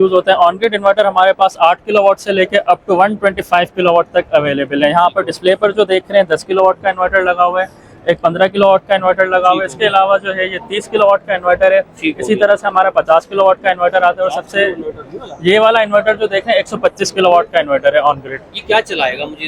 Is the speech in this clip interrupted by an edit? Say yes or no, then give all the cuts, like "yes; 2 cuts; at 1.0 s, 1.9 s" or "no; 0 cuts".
no; 0 cuts